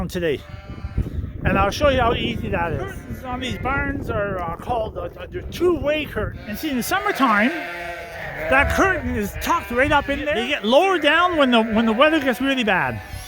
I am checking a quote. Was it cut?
yes; 3 cuts; at 3.1 s, 6.5 s, 10.5 s

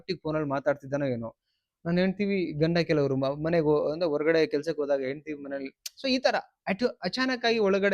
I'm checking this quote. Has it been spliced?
no; 0 cuts

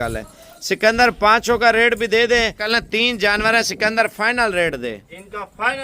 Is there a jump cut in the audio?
yes; 1 cut; at 2.6 s

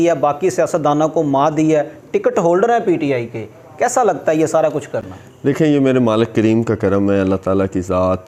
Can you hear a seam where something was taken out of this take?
no; 0 cuts

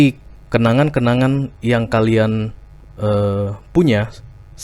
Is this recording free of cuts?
yes; 0 cuts

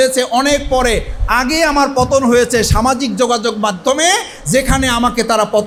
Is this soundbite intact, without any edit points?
yes; 0 cuts

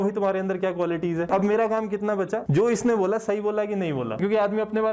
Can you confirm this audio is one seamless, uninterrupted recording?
no; 3 cuts; at 1.3 s, 2.4 s, 4.2 s

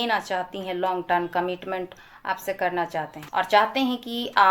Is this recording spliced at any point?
yes; 1 cut; at 3.2 s

